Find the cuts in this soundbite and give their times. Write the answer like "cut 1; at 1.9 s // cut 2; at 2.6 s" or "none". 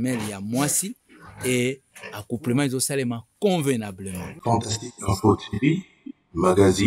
cut 1; at 4.4 s

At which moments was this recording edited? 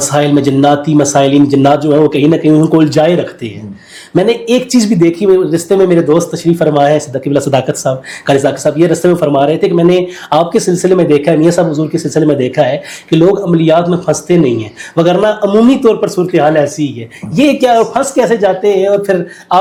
none

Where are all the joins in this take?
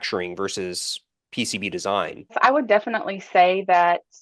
cut 1; at 2.4 s

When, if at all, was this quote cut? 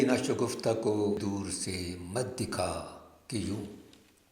cut 1; at 1.2 s

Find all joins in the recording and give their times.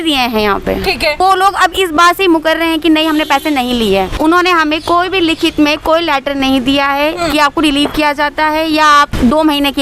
cut 1; at 1.2 s // cut 2; at 4.2 s

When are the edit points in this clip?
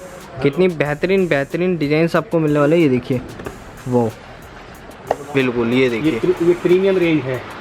cut 1; at 5.3 s

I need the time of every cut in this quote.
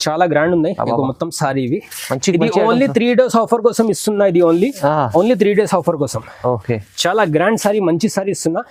none

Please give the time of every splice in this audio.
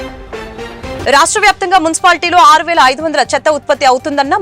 cut 1; at 1.0 s

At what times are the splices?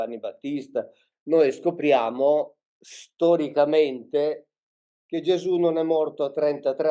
cut 1; at 1.0 s

